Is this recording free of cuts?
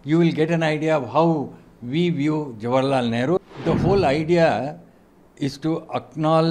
no; 1 cut; at 3.4 s

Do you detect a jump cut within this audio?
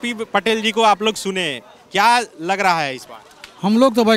no; 0 cuts

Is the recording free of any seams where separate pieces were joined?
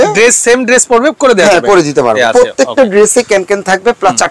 no; 1 cut; at 2.2 s

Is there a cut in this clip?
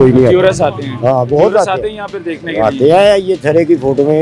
no; 0 cuts

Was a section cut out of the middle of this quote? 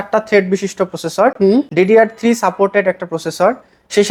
no; 0 cuts

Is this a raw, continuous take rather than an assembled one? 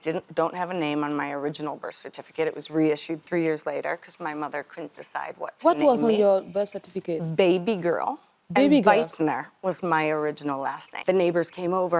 no; 1 cut; at 10.9 s

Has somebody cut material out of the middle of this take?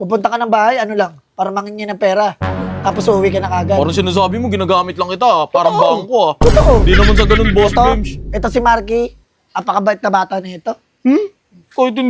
no; 0 cuts

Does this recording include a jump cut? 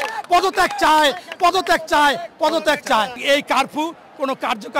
yes; 1 cut; at 3.2 s

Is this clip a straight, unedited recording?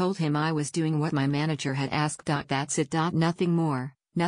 no; 1 cut; at 2.3 s

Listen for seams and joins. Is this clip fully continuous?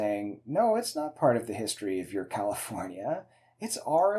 yes; 0 cuts

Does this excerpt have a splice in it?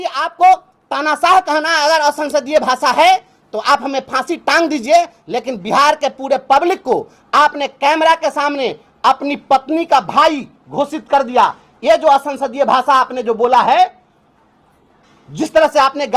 no; 0 cuts

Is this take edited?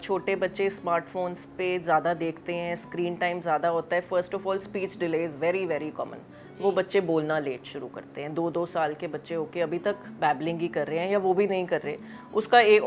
no; 0 cuts

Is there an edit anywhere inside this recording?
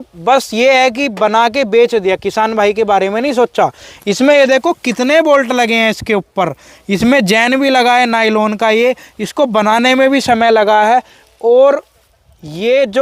no; 0 cuts

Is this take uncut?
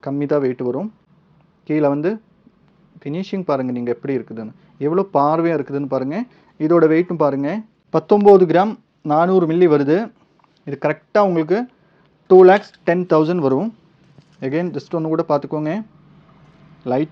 yes; 0 cuts

